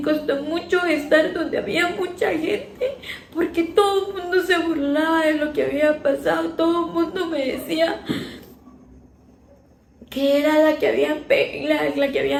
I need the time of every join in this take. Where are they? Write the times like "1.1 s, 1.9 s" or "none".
none